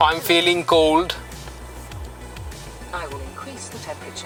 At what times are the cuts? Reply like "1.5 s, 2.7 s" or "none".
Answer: none